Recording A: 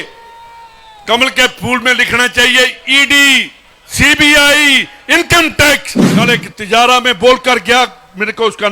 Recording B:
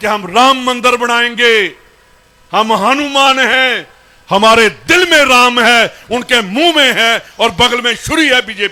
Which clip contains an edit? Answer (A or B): A